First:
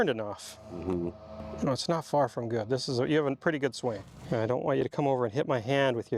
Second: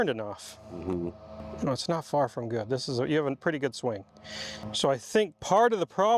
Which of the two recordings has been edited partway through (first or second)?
first